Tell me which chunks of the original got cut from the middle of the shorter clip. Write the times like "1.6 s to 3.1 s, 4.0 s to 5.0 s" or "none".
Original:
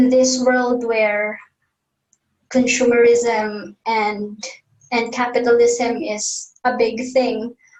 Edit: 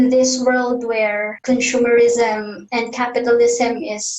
1.3 s to 2.4 s, 3.6 s to 4.8 s